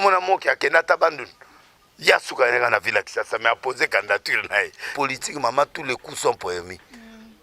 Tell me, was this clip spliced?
yes; 1 cut; at 4.9 s

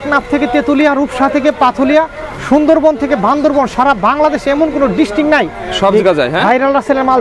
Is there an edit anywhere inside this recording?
no; 0 cuts

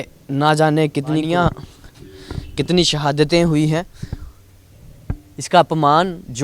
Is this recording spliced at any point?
yes; 1 cut; at 1.2 s

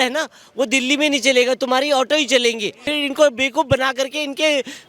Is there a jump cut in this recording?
yes; 1 cut; at 2.9 s

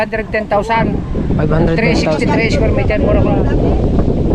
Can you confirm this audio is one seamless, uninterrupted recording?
yes; 0 cuts

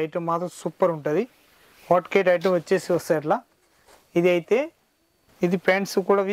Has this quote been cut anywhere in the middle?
yes; 1 cut; at 5.2 s

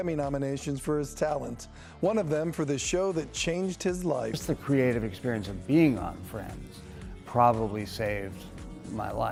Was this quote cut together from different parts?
no; 0 cuts

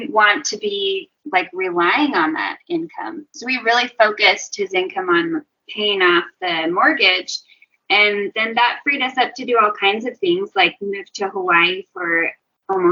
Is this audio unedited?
yes; 0 cuts

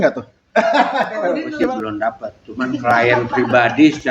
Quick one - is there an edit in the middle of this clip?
yes; 1 cut; at 1.5 s

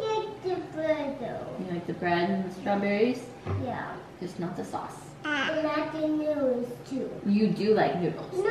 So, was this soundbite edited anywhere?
no; 0 cuts

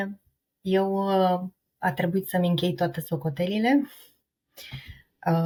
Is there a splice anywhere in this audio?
no; 0 cuts

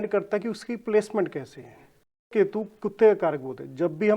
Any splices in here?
yes; 1 cut; at 2.3 s

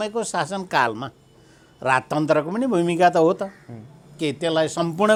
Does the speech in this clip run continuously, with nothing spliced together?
yes; 0 cuts

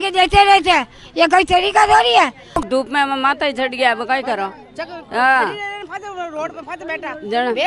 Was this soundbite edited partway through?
yes; 1 cut; at 2.6 s

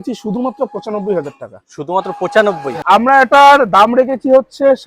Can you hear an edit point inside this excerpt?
yes; 1 cut; at 2.8 s

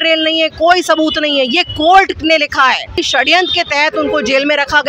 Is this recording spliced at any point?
yes; 1 cut; at 3.0 s

